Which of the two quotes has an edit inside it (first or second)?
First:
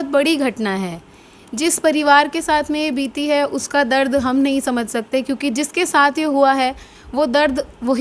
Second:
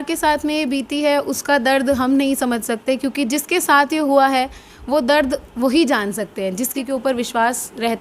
second